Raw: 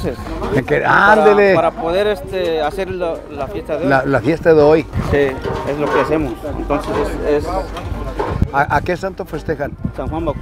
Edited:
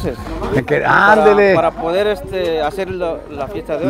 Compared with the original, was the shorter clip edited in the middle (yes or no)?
no